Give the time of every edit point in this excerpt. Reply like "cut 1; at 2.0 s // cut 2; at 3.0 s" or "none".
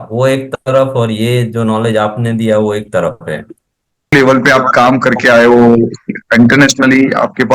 cut 1; at 4.1 s